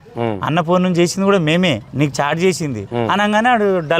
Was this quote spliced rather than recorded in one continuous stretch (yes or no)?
yes